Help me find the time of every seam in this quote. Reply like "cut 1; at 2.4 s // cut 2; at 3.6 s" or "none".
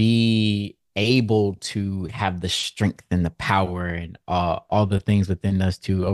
cut 1; at 4.7 s

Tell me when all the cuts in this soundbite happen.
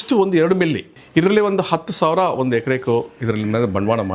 cut 1; at 0.9 s

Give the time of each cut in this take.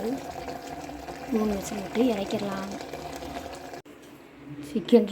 cut 1; at 3.9 s

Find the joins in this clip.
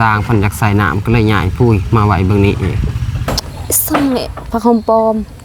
cut 1; at 3.1 s

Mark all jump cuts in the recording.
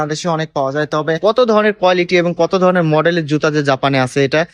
cut 1; at 1.2 s

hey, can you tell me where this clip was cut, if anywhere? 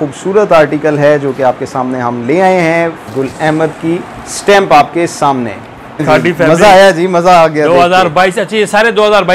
cut 1; at 3.0 s // cut 2; at 6.0 s

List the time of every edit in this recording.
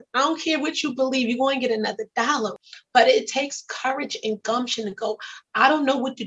none

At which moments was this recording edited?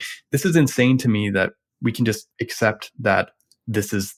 none

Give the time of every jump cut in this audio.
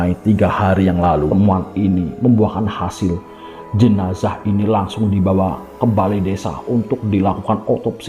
cut 1; at 1.3 s

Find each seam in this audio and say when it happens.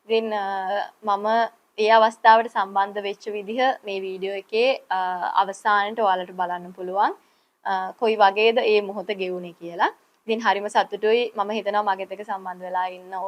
none

